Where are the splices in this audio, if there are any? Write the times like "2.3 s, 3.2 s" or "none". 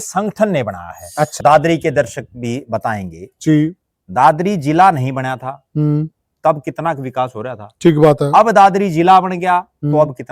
1.4 s

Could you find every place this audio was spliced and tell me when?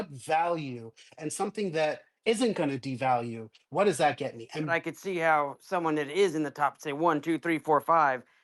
4.7 s

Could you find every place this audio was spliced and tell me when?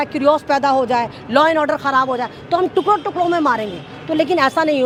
none

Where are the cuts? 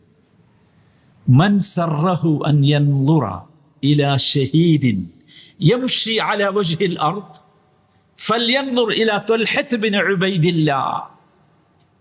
none

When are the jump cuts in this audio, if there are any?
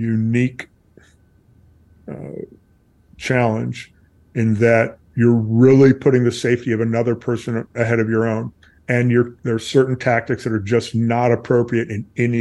none

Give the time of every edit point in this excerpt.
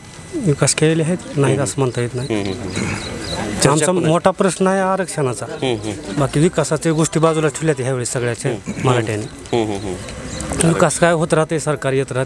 none

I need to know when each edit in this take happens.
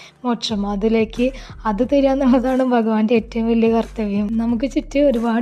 4.3 s

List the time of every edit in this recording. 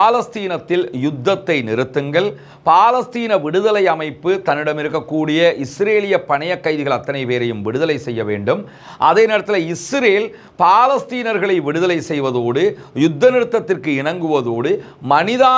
none

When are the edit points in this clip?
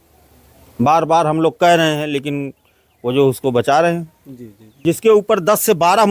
4.6 s

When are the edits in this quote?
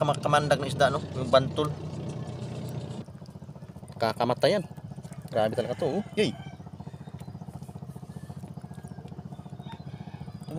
3.0 s

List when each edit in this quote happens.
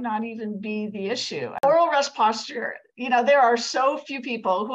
1.6 s

